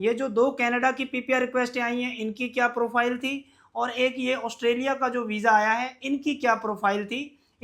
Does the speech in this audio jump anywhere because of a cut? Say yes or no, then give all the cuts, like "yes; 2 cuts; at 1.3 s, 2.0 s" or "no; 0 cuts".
no; 0 cuts